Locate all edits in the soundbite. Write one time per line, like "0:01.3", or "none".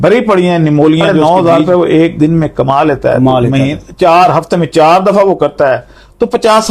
0:01.1